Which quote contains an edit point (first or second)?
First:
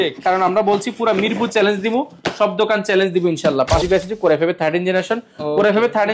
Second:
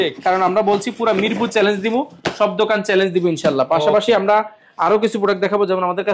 first